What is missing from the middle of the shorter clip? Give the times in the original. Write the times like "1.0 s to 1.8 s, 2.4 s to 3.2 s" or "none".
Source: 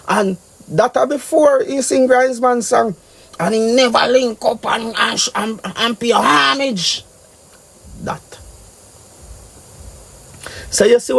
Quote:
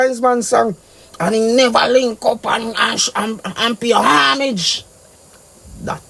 none